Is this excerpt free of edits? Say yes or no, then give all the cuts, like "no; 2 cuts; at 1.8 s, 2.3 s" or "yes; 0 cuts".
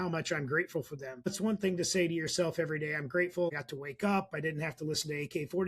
no; 2 cuts; at 1.3 s, 3.5 s